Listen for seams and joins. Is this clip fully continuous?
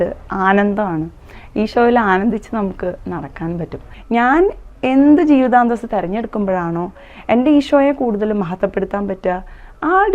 no; 1 cut; at 3.9 s

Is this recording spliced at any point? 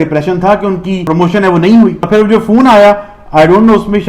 yes; 2 cuts; at 1.0 s, 2.1 s

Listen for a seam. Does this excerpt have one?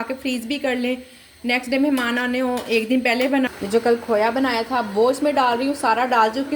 yes; 1 cut; at 3.5 s

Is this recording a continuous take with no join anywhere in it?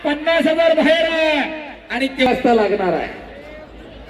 no; 1 cut; at 2.3 s

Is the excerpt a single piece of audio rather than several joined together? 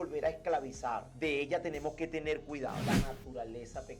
no; 2 cuts; at 1.1 s, 2.8 s

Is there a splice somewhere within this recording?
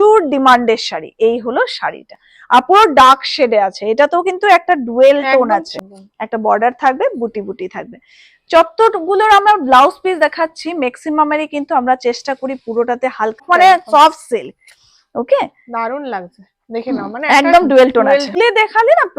yes; 3 cuts; at 5.7 s, 13.4 s, 18.4 s

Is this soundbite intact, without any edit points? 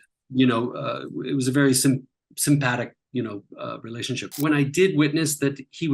no; 1 cut; at 4.3 s

